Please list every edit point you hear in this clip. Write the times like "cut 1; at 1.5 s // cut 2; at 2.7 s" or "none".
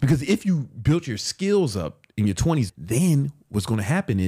cut 1; at 2.7 s